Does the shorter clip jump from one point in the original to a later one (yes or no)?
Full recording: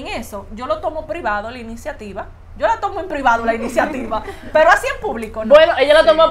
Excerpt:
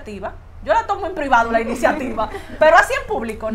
no